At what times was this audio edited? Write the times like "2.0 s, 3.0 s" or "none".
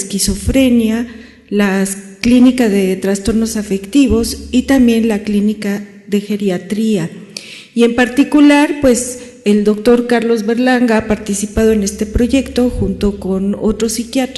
12.0 s